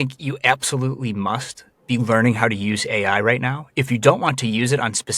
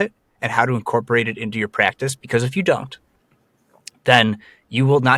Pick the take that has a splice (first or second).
first